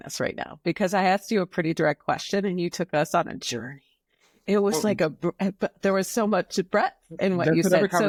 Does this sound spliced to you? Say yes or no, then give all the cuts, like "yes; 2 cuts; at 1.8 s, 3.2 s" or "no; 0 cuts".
no; 0 cuts